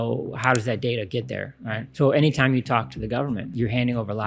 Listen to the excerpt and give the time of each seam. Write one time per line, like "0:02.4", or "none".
0:01.8
0:03.5

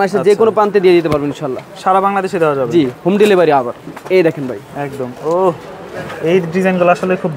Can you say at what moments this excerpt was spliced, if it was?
none

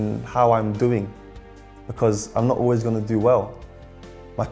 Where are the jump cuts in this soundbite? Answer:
none

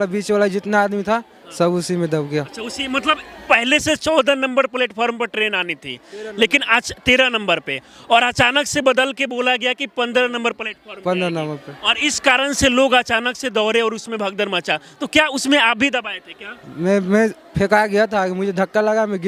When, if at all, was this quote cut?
none

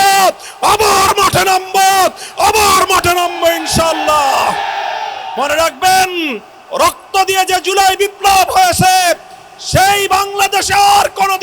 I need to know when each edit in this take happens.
0:05.3

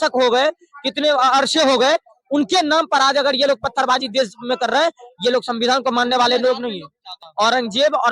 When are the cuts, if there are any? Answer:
0:07.2

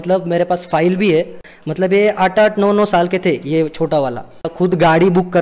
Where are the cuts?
0:01.4
0:04.5

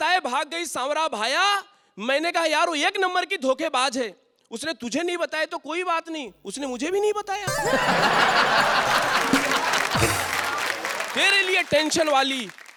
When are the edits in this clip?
none

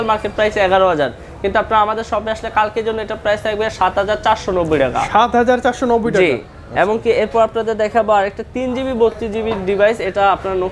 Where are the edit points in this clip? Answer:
none

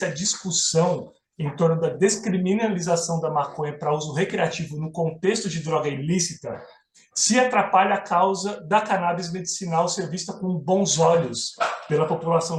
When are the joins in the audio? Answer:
none

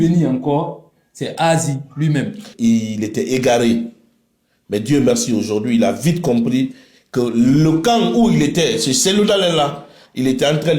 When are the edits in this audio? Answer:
0:02.5

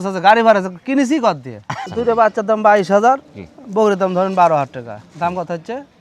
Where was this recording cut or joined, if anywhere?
0:01.7

